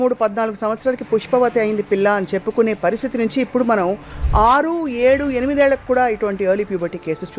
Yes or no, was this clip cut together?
no